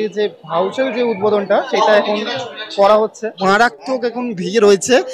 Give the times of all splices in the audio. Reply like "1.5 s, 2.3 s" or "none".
1.7 s, 3.3 s